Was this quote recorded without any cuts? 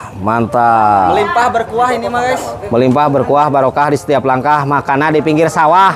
yes; 0 cuts

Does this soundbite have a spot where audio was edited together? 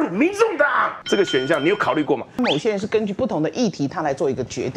yes; 2 cuts; at 0.9 s, 2.4 s

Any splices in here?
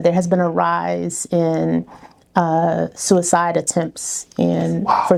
no; 0 cuts

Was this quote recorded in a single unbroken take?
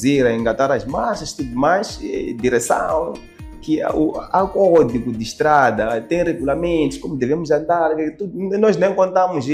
yes; 0 cuts

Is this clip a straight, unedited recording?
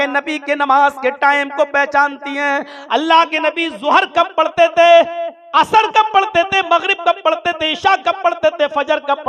yes; 0 cuts

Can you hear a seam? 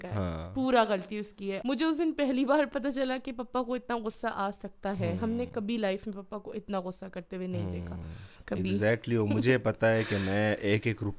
yes; 2 cuts; at 1.6 s, 8.3 s

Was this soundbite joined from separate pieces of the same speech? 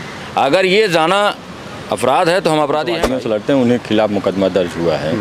yes; 1 cut; at 3.0 s

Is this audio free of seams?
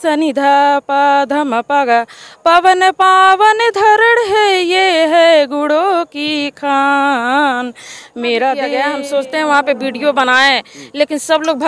no; 1 cut; at 8.8 s

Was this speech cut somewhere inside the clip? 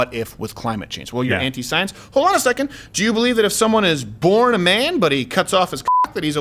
no; 0 cuts

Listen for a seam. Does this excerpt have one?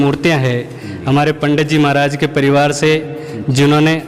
no; 0 cuts

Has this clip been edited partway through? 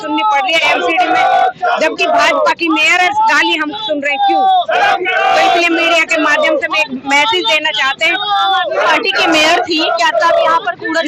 no; 0 cuts

